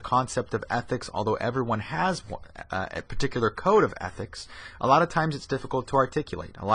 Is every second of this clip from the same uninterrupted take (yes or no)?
yes